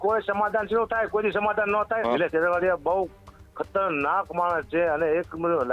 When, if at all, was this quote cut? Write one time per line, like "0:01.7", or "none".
0:02.0